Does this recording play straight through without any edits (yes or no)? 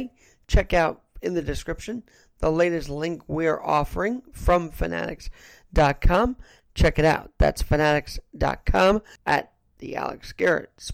no